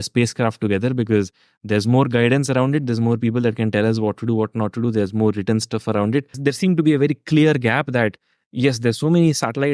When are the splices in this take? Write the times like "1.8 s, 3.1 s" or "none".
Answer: 6.4 s